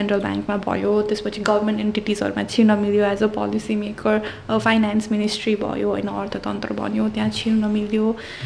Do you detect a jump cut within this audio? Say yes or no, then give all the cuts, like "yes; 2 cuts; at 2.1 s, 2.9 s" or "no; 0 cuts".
no; 0 cuts